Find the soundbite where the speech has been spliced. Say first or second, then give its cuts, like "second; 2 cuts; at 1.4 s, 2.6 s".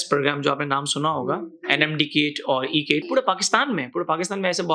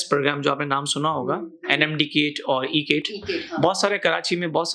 first; 1 cut; at 3.1 s